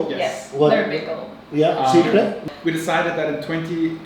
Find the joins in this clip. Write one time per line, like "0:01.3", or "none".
0:02.4